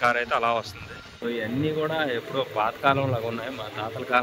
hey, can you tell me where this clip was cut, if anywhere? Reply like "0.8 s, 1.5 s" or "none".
1.1 s